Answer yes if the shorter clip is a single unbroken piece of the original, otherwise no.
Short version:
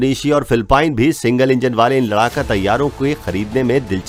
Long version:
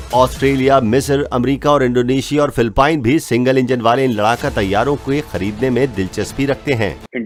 yes